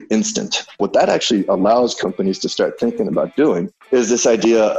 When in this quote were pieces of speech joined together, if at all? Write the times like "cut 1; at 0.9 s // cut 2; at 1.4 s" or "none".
cut 1; at 0.8 s // cut 2; at 3.7 s